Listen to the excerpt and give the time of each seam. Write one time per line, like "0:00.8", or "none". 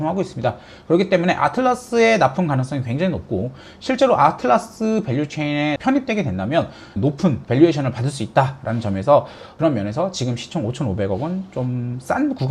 0:06.8
0:09.4